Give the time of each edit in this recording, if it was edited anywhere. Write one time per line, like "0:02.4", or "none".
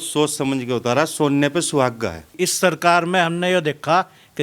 0:02.2